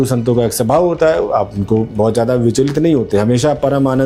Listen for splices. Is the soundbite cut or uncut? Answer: uncut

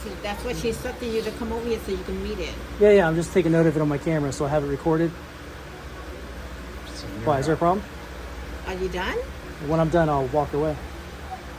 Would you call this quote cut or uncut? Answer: cut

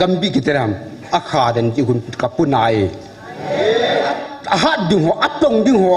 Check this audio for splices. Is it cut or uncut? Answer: cut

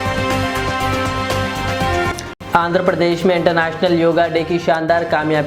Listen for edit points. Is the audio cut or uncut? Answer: uncut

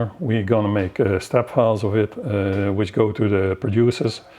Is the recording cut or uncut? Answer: uncut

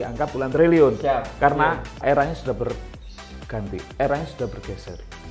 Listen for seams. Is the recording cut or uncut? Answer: cut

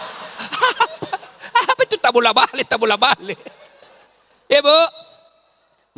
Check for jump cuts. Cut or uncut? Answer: uncut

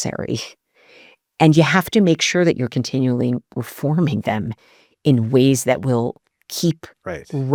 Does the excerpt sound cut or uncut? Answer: uncut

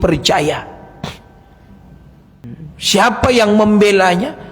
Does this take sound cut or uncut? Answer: cut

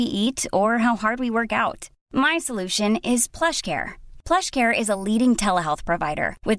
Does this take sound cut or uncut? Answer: uncut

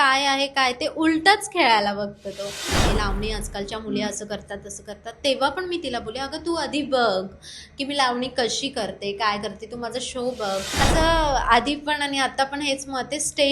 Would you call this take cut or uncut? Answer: cut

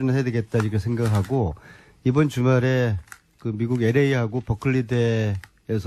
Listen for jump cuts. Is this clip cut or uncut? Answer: uncut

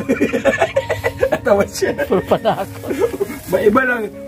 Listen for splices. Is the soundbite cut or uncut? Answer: uncut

